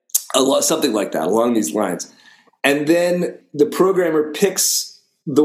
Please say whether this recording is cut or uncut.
cut